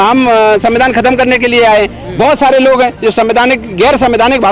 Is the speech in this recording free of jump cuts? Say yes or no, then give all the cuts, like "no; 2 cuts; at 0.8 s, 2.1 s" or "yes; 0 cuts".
yes; 0 cuts